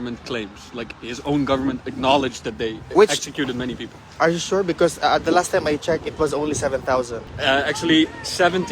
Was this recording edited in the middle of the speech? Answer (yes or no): yes